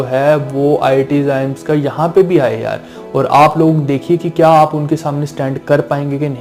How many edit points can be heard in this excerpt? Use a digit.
0